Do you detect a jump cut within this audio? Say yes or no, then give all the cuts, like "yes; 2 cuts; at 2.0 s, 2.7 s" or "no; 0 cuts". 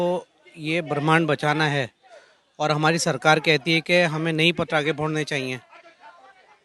no; 0 cuts